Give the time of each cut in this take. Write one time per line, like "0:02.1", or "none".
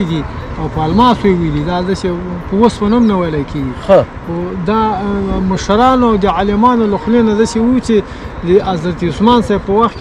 none

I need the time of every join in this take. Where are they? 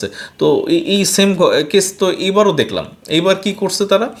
none

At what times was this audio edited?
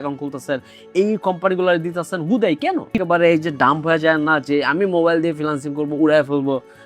0:02.9

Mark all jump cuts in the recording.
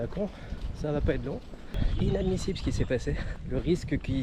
0:01.8
0:03.3

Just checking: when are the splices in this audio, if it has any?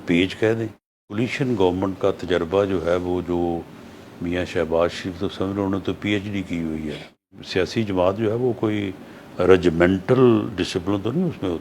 0:01.1
0:07.4

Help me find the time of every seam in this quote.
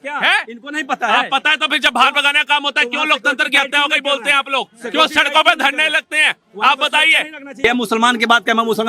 0:07.6

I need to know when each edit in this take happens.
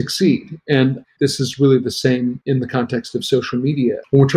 0:01.0
0:02.4

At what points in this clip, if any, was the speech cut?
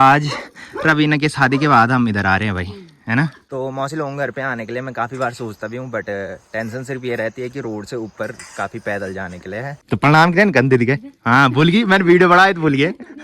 0:03.4
0:09.7

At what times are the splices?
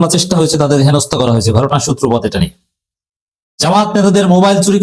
none

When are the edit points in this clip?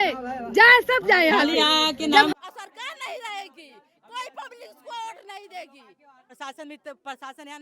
0:02.3
0:06.4

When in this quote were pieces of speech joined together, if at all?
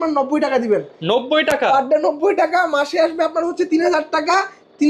none

